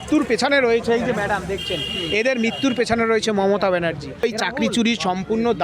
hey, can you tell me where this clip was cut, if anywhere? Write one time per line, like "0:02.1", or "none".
0:04.2

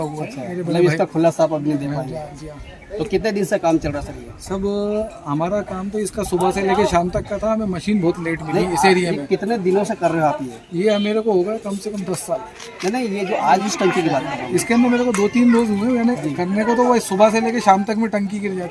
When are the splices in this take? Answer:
none

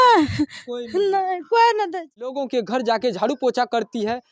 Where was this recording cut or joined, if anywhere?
0:02.3

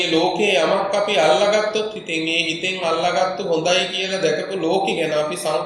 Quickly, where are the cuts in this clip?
none

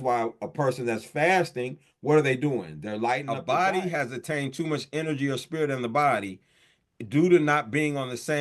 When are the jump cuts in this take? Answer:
0:03.3

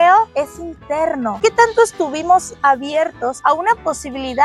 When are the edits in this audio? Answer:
0:01.4

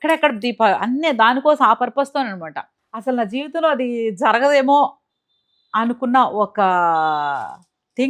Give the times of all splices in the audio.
0:02.9

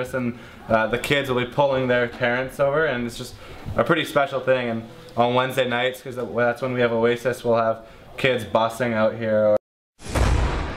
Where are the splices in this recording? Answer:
0:09.6

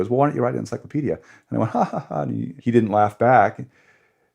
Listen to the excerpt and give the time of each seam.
0:02.5

